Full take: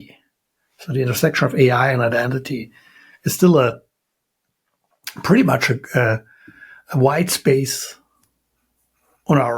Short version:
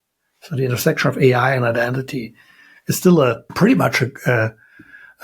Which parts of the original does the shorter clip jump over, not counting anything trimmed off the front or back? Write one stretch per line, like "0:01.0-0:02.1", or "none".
0:03.8-0:05.1